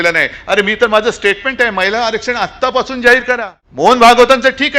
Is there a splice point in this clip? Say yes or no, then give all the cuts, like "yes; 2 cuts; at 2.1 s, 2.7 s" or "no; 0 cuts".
yes; 1 cut; at 3.6 s